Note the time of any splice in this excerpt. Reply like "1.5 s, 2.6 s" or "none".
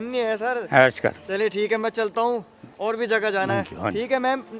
none